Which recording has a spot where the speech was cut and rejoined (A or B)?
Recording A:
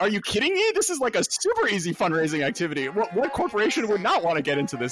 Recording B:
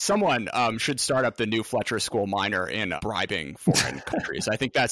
B